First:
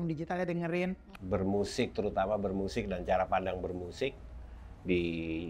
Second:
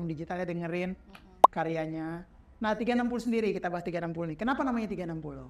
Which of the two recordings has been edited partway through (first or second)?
first